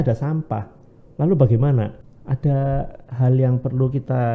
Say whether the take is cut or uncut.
cut